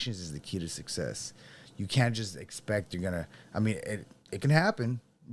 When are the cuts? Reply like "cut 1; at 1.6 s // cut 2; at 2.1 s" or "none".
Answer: none